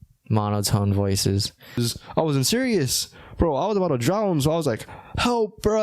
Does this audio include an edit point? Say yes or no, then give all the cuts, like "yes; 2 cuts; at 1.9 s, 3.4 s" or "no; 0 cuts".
yes; 1 cut; at 1.8 s